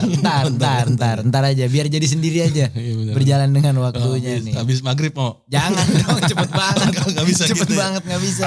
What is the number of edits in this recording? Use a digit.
0